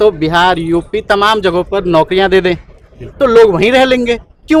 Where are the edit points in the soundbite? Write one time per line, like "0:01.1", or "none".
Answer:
none